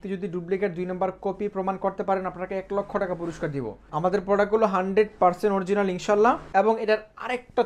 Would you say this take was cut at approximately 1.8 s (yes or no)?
no